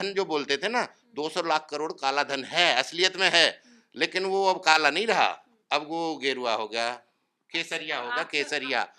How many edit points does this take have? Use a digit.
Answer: 0